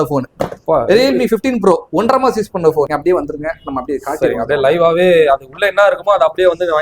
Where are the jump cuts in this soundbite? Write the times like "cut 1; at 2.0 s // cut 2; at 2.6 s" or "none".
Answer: cut 1; at 2.9 s